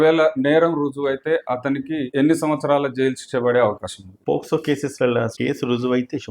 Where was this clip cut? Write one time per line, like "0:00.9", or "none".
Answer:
0:05.3

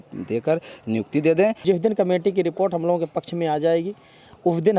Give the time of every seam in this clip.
0:01.6

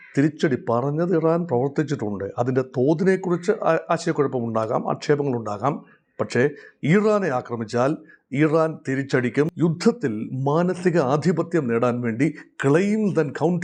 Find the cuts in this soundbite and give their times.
0:09.5

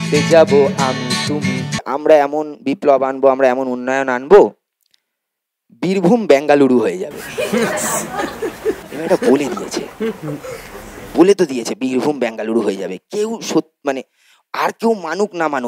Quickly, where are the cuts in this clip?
0:01.9

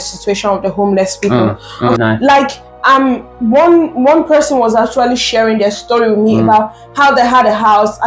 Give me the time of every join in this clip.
0:02.0

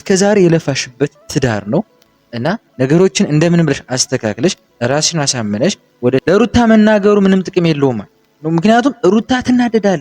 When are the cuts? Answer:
0:06.2

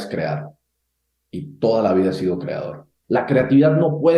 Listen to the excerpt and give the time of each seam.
0:02.9

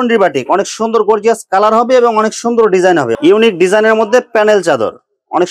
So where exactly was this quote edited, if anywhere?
0:03.1

